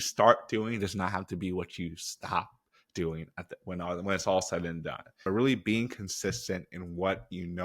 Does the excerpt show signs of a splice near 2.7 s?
no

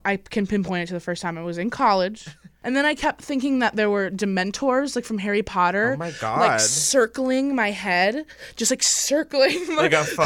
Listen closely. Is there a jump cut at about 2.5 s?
yes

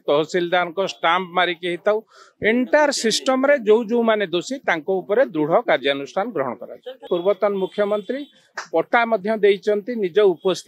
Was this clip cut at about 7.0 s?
yes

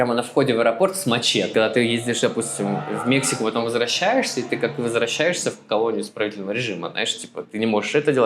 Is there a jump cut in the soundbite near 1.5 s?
yes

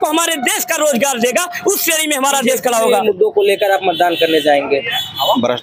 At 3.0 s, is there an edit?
yes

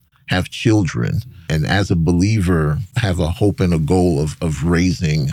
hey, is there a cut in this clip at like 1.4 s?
yes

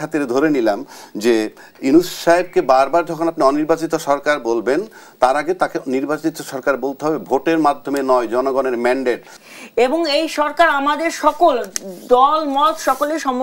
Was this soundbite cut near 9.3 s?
yes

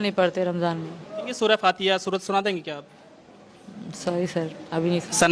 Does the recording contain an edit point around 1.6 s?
yes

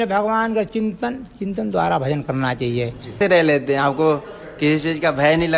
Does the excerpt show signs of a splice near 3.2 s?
yes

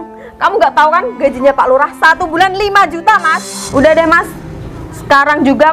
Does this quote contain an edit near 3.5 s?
yes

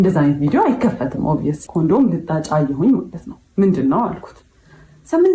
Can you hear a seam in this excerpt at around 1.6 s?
yes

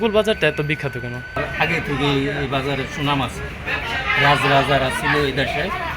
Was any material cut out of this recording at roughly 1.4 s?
yes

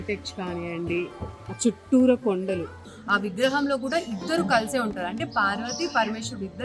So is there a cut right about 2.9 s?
yes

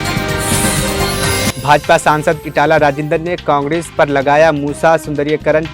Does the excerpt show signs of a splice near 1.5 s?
yes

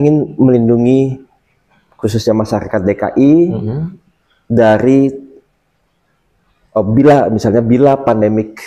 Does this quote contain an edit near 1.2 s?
no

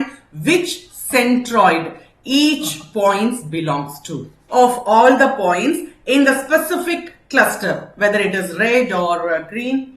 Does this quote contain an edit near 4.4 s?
yes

